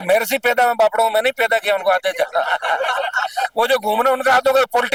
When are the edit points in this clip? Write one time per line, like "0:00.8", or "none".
none